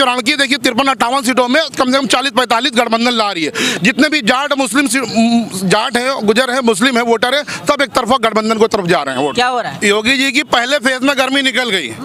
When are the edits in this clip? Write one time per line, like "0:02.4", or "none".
0:09.7